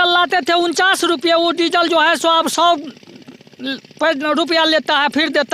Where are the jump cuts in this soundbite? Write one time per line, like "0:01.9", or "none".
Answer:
none